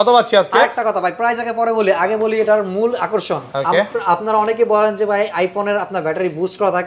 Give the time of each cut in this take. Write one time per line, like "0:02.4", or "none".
none